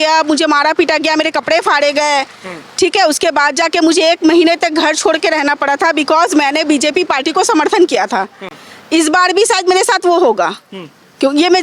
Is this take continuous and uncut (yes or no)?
yes